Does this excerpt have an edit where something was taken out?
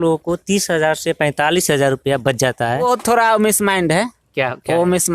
yes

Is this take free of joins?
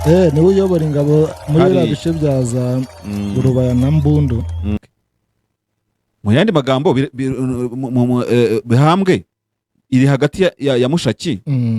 no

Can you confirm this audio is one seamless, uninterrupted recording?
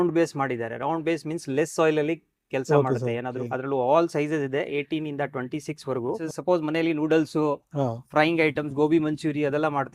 no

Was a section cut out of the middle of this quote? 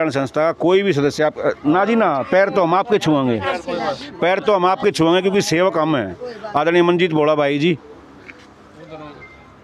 no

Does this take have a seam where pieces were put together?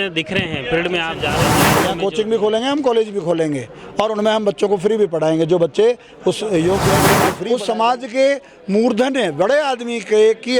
yes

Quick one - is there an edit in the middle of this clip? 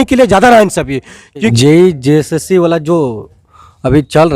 yes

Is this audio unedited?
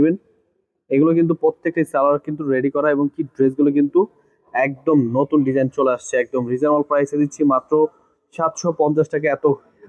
yes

